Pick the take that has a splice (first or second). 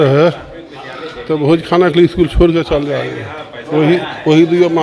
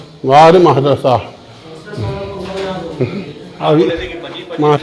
second